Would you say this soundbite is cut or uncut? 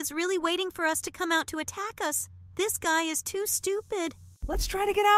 uncut